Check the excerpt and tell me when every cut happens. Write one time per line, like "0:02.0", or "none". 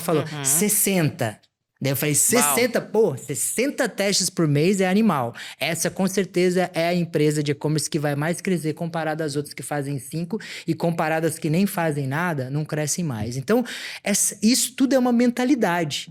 none

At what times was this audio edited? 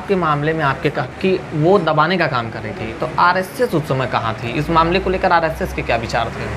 0:01.1

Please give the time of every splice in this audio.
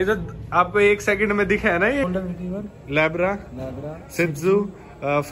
0:02.0

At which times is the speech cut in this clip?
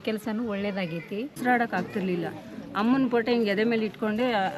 0:01.4

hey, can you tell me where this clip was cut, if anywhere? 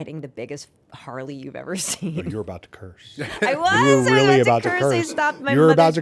none

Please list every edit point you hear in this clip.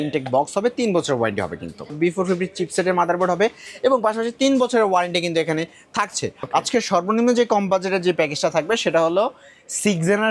0:01.9
0:06.4

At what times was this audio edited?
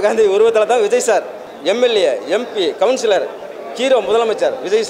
0:01.4

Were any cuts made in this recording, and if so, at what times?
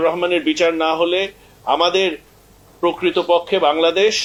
none

